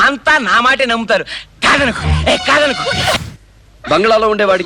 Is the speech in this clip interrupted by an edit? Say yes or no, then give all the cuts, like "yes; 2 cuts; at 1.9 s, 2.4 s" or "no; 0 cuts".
yes; 1 cut; at 3.3 s